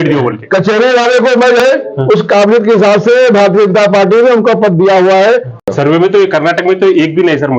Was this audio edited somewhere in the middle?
yes; 2 cuts; at 1.6 s, 5.7 s

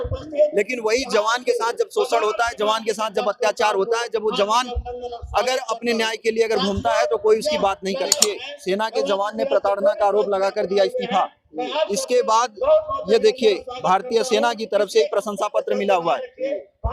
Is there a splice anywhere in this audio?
yes; 1 cut; at 8.5 s

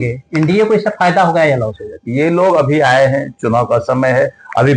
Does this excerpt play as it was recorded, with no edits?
no; 1 cut; at 2.0 s

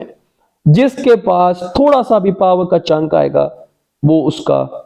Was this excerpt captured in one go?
yes; 0 cuts

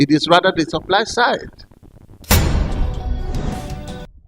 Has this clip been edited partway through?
yes; 1 cut; at 2.2 s

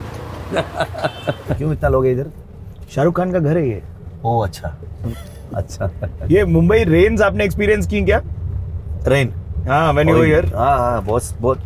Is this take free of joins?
no; 3 cuts; at 1.5 s, 5.0 s, 6.2 s

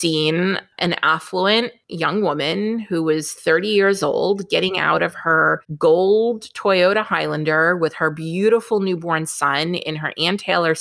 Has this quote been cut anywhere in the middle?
yes; 2 cuts; at 1.8 s, 5.7 s

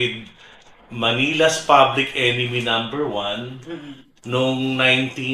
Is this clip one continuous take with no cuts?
yes; 0 cuts

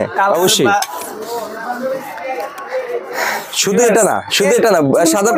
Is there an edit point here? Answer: no; 0 cuts

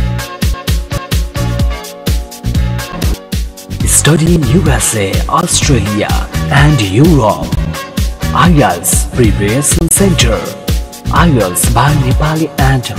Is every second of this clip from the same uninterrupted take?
no; 1 cut; at 1.0 s

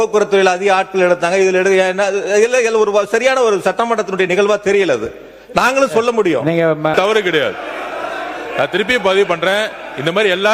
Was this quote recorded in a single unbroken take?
no; 1 cut; at 6.9 s

